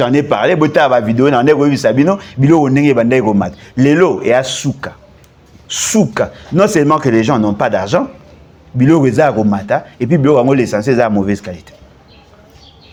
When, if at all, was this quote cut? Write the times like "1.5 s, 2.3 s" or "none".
none